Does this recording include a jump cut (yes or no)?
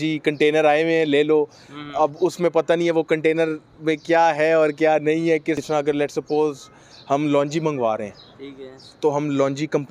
yes